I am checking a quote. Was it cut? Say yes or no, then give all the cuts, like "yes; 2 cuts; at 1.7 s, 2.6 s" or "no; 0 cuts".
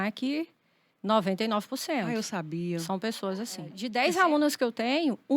yes; 1 cut; at 3.8 s